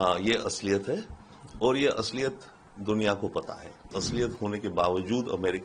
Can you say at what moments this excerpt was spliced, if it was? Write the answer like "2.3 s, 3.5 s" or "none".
4.0 s